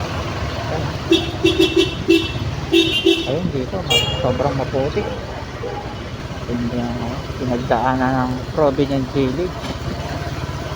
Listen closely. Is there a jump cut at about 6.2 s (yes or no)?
yes